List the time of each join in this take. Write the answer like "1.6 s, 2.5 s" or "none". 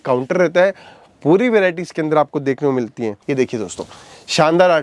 3.2 s